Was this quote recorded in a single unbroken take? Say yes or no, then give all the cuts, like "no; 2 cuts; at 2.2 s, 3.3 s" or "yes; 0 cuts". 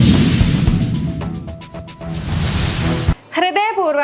no; 1 cut; at 2.0 s